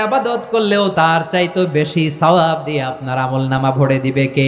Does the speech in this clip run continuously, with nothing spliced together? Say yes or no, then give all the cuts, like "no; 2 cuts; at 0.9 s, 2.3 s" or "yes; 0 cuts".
no; 1 cut; at 0.9 s